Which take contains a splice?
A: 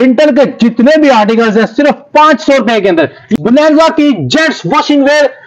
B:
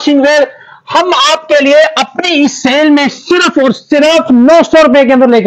A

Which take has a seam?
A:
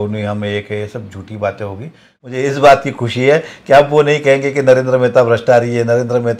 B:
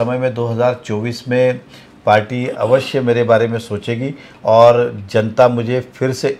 A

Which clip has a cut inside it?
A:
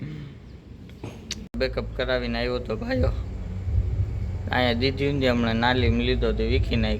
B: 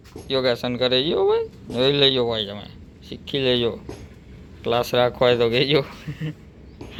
A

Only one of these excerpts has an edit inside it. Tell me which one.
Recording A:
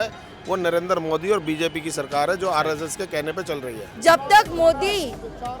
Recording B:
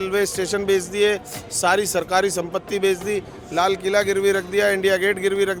A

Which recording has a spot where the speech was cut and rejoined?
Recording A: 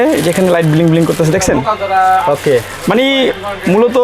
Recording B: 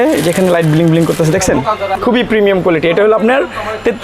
B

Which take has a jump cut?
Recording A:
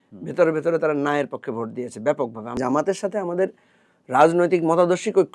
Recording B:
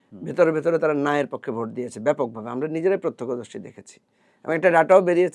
A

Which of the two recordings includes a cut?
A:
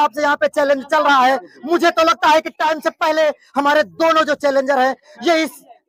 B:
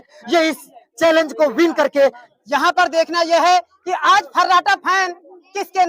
B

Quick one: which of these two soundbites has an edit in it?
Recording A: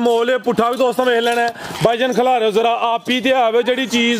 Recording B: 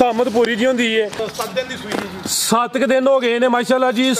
B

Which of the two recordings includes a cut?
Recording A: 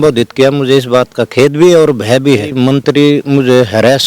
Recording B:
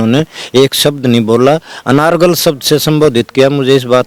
A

